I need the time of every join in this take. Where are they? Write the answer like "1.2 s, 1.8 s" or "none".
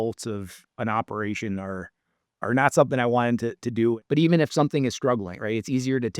4.0 s